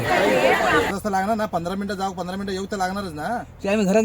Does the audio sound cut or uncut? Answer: cut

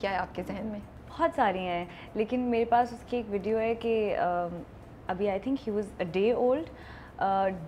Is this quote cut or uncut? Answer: uncut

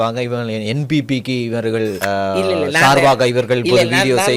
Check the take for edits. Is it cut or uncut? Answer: cut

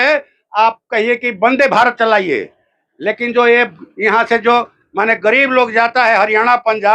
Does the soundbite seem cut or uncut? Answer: uncut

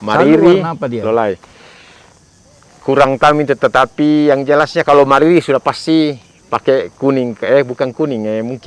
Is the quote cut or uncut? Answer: uncut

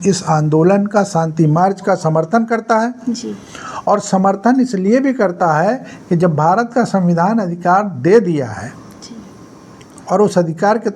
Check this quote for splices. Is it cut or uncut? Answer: uncut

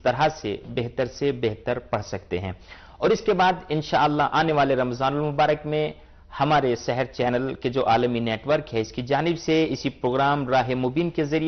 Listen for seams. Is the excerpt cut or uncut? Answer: cut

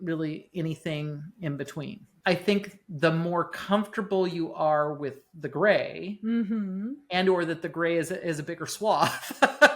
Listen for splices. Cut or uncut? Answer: cut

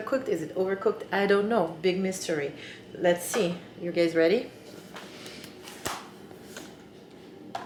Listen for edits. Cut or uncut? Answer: uncut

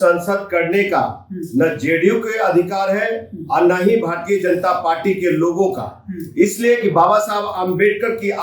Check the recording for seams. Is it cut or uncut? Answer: uncut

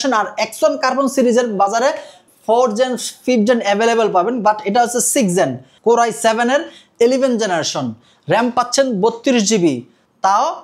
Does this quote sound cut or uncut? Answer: cut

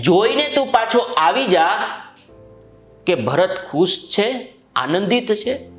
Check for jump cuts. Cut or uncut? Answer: uncut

